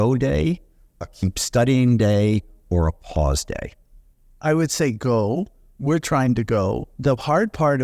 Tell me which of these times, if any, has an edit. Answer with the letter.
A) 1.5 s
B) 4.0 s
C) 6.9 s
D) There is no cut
C